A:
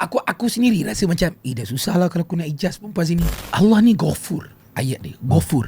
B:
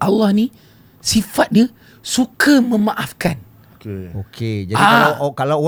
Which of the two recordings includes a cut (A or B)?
A